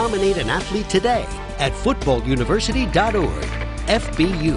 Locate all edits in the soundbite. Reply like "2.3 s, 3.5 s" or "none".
none